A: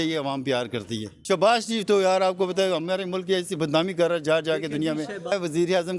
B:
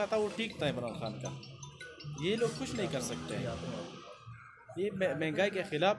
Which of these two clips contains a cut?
A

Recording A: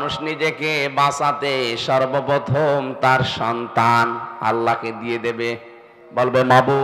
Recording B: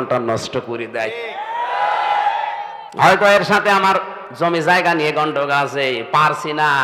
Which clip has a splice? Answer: B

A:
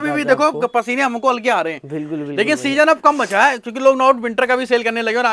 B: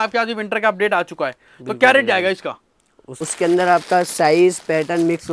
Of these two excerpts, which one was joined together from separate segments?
B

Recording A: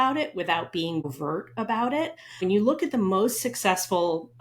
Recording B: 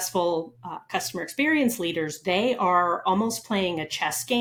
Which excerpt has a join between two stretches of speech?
A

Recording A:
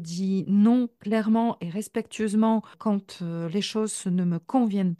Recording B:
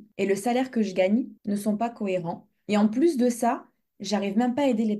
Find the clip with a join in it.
A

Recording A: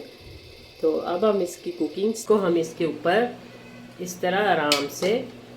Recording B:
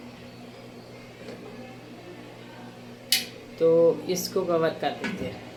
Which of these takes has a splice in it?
A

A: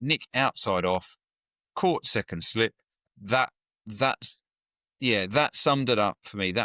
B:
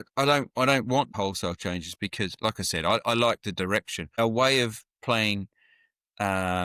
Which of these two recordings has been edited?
B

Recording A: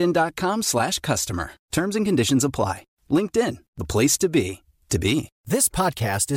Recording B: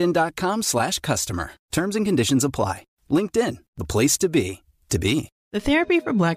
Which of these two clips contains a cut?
B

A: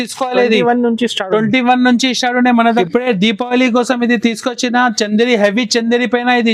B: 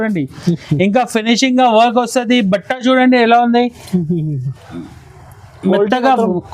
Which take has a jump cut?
A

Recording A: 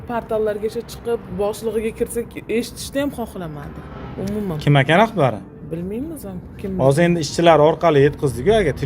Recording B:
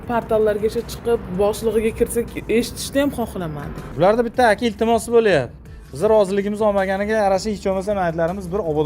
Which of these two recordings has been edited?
B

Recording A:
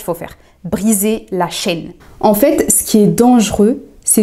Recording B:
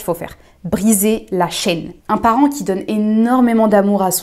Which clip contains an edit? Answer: B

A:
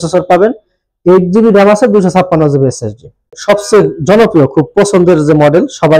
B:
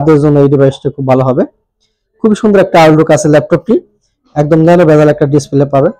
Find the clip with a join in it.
A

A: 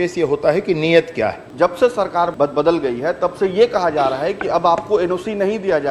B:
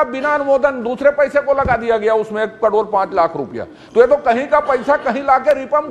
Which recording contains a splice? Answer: A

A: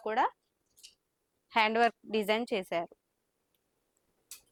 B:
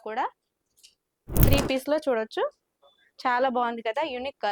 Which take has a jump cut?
B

